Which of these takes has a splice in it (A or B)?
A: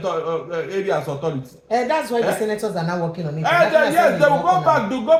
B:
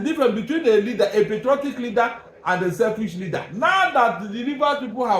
B